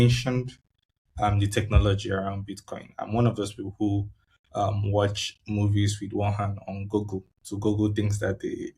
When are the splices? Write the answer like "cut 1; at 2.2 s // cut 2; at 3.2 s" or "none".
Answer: none